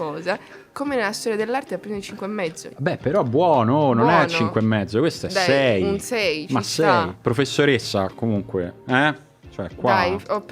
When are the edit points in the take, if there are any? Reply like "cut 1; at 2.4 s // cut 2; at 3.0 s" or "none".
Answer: cut 1; at 2.6 s // cut 2; at 7.2 s